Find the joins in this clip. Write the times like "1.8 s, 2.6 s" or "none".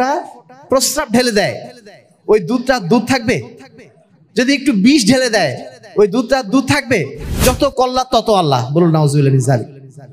7.3 s